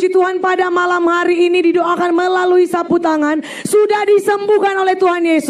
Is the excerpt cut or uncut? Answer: uncut